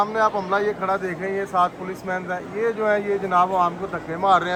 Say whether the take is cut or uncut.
uncut